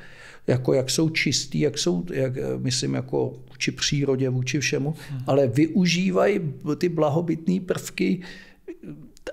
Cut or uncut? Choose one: uncut